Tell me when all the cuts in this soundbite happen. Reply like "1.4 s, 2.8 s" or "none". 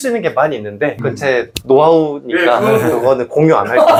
none